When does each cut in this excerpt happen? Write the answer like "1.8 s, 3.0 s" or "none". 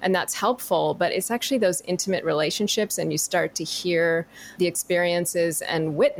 4.5 s